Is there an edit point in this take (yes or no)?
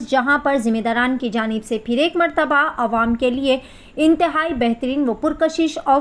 no